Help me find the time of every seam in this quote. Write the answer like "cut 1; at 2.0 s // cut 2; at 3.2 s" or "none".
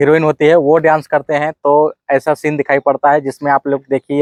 none